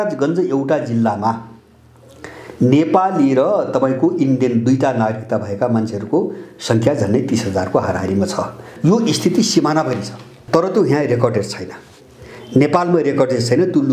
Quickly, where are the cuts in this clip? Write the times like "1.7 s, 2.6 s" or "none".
8.7 s, 10.4 s